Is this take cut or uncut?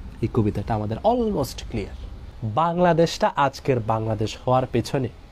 cut